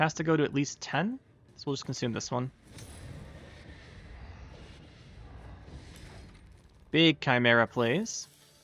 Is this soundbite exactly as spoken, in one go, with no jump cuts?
yes; 0 cuts

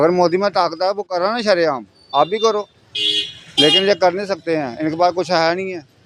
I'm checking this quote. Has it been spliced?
no; 0 cuts

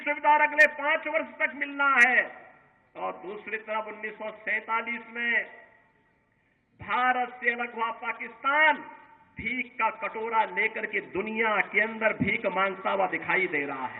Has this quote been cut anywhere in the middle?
no; 0 cuts

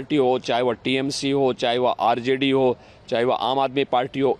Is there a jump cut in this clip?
no; 0 cuts

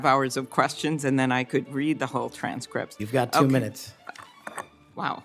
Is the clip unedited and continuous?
yes; 0 cuts

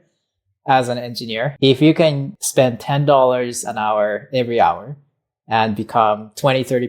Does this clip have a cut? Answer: yes; 2 cuts; at 1.5 s, 2.3 s

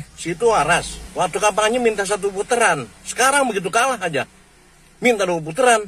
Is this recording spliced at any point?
yes; 1 cut; at 1.0 s

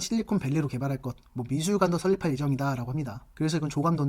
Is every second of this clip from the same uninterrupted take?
yes; 0 cuts

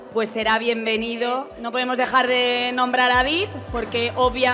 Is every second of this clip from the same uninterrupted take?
no; 1 cut; at 1.5 s

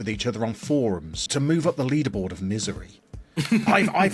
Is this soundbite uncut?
no; 1 cut; at 1.2 s

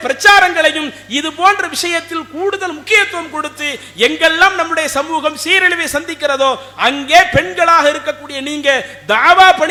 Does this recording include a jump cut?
no; 0 cuts

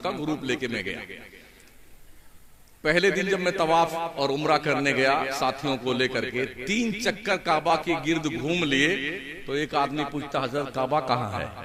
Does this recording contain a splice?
no; 0 cuts

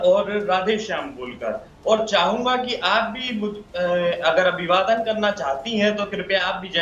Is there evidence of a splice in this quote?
no; 0 cuts

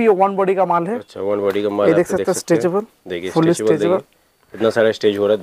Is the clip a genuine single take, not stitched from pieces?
yes; 0 cuts

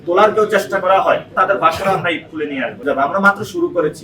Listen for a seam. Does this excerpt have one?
yes; 2 cuts; at 1.3 s, 2.8 s

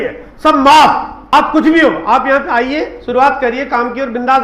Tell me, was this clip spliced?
yes; 1 cut; at 1.3 s

